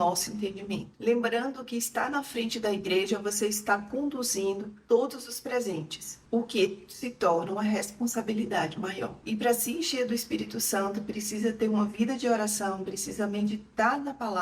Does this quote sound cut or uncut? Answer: uncut